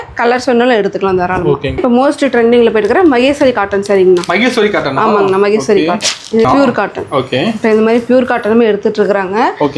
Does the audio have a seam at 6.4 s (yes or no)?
yes